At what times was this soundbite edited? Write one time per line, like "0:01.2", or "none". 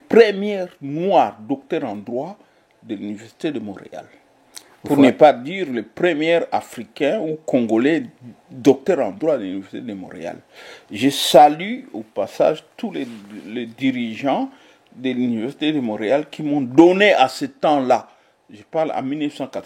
none